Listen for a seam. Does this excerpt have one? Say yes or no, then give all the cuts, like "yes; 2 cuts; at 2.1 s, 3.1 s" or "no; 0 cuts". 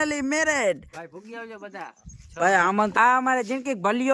yes; 1 cut; at 2.9 s